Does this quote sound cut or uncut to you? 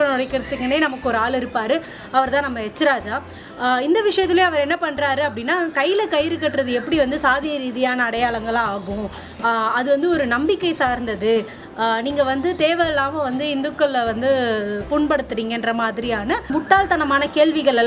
uncut